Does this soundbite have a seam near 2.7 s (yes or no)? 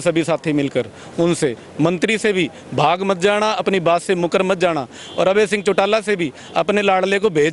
no